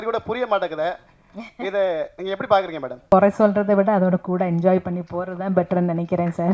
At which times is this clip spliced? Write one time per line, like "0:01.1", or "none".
0:03.0

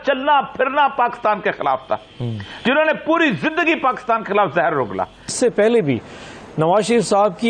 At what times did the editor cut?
0:05.3

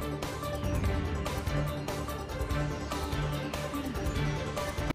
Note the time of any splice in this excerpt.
none

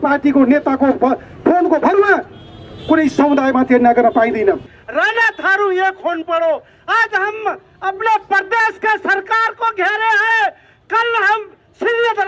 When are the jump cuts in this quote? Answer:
0:04.8

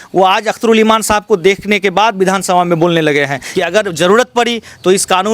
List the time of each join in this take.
0:03.4

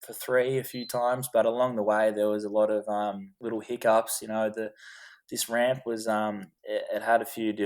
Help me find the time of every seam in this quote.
0:03.3
0:06.5

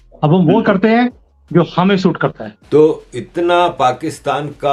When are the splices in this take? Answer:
0:02.5

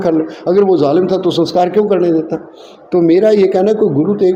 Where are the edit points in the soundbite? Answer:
none

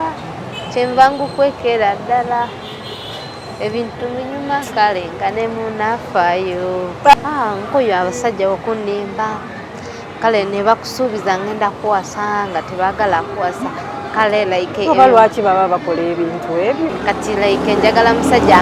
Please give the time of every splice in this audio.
0:07.1
0:16.9

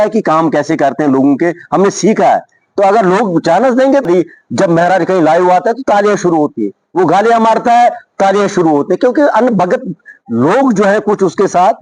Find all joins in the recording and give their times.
0:04.1

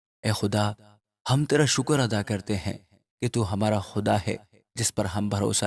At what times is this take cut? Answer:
none

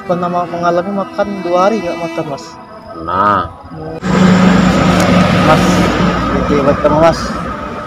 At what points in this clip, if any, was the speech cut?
0:04.1

